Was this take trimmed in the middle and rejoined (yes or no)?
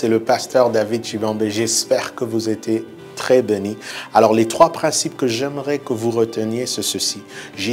yes